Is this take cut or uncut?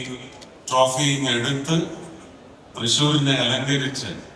uncut